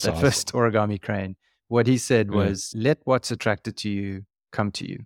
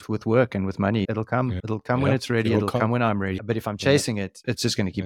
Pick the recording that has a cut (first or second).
second